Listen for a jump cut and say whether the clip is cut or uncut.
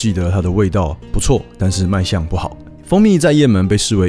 cut